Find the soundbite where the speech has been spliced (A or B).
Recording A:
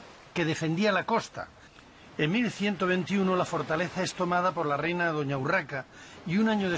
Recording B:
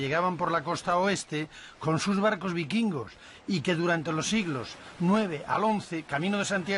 A